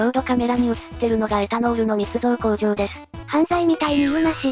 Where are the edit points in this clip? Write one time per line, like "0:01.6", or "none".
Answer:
none